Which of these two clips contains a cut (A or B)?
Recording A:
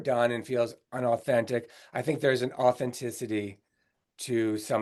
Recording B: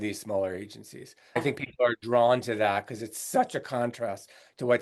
B